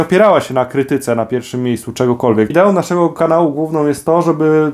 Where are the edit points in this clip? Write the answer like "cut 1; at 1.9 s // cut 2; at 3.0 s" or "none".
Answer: cut 1; at 2.5 s